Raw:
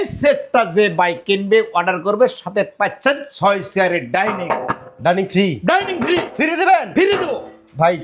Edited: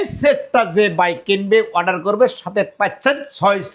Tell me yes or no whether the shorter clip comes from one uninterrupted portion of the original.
yes